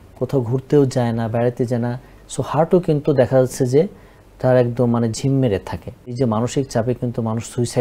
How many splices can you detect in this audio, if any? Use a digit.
2